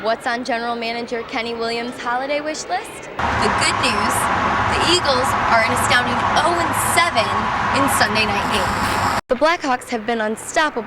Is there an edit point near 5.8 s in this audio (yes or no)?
no